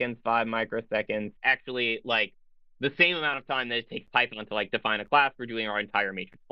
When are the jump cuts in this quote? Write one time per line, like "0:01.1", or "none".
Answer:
0:01.3